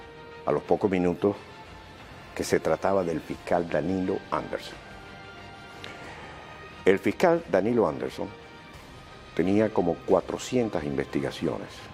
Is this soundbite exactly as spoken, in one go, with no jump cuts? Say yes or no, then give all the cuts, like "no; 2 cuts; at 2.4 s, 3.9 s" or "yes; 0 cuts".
no; 1 cut; at 4.0 s